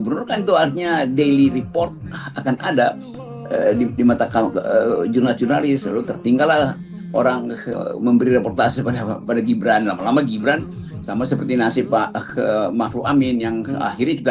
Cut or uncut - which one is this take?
uncut